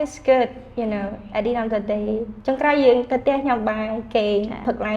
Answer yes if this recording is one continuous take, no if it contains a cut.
no